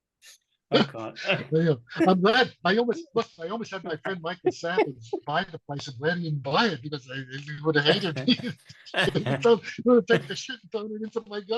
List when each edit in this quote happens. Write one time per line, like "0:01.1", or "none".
none

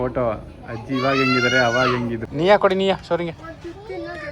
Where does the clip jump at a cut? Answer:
0:02.2

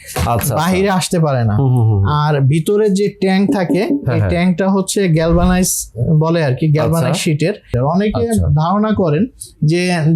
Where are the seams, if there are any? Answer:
0:07.8

